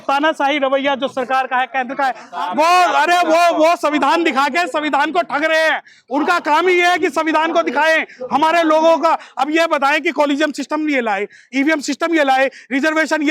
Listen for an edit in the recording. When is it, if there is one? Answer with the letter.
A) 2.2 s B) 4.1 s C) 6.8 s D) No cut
A